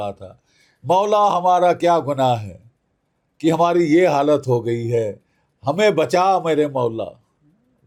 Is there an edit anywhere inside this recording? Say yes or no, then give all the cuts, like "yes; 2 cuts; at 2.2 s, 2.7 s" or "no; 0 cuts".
no; 0 cuts